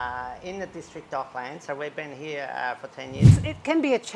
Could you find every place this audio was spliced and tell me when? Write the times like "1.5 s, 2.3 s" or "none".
3.2 s